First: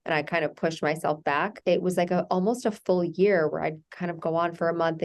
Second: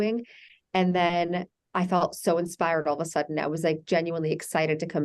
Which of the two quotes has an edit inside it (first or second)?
first